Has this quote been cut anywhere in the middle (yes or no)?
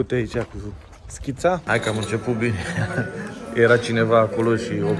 yes